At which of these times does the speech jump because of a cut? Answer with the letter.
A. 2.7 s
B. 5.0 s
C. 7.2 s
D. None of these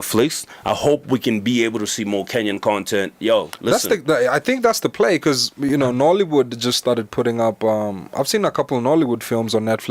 D